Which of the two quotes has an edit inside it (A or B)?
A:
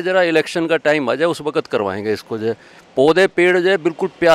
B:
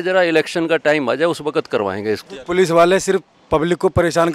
B